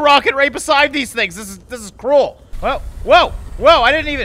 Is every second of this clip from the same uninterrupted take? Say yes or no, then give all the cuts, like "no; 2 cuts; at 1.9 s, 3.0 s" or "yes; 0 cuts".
no; 1 cut; at 2.5 s